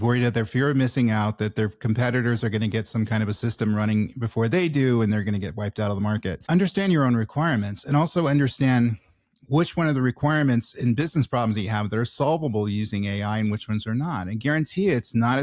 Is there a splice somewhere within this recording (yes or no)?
yes